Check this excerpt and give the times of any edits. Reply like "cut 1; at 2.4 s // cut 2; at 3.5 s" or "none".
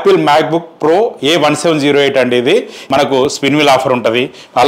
cut 1; at 2.8 s